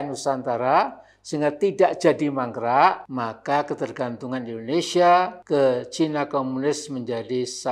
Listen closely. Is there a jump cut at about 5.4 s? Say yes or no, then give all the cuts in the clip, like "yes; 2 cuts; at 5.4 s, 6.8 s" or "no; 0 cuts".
yes; 2 cuts; at 3.0 s, 5.4 s